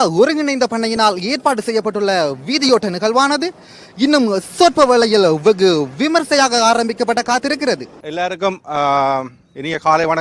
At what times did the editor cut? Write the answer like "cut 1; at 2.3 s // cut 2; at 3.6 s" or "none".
cut 1; at 8.0 s